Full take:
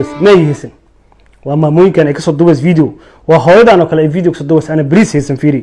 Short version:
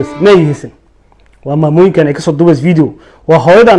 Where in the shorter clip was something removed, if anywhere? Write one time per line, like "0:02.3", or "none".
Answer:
none